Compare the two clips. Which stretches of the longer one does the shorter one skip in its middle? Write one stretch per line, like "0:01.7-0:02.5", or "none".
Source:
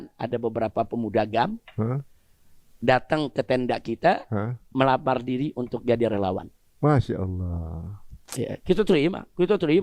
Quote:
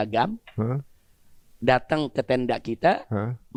none